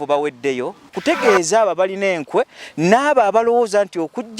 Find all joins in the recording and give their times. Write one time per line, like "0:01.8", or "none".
0:00.9